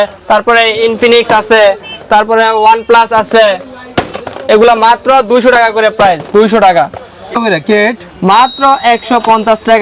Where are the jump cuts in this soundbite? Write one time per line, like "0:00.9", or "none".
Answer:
0:07.3